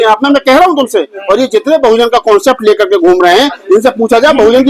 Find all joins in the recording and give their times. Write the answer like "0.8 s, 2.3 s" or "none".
none